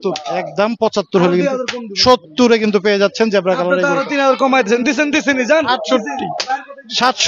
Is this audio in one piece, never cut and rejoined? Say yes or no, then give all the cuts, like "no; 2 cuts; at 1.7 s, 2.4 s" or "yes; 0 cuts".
yes; 0 cuts